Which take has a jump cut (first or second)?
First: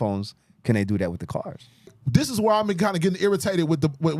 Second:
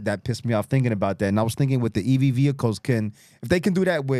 first